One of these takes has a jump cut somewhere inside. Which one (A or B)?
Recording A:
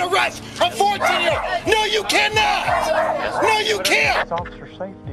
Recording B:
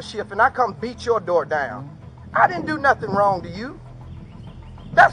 A